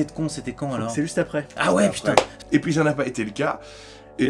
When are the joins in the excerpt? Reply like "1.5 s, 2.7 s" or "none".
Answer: 2.4 s